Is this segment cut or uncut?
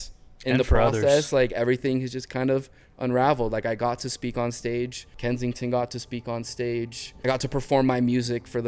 cut